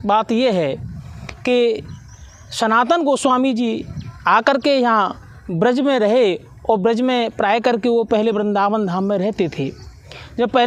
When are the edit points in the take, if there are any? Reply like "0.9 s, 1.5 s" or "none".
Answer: none

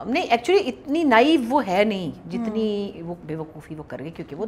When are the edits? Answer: 3.2 s

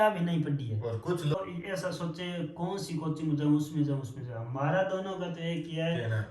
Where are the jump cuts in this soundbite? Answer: 1.4 s

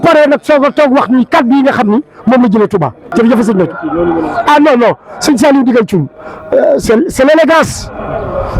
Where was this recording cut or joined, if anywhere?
3.0 s

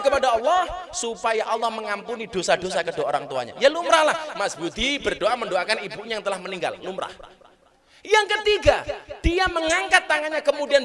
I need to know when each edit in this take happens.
none

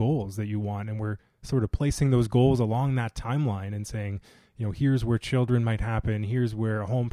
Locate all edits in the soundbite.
none

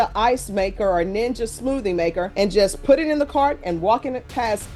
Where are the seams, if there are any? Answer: none

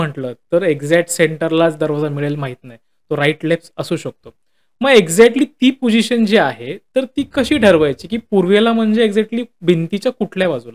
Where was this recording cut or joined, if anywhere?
none

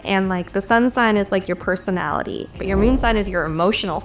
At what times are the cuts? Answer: 2.6 s

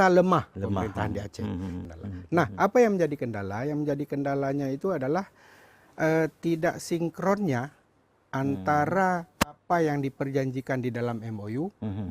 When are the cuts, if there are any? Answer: 1.8 s

